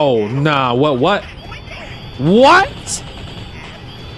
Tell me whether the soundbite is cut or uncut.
uncut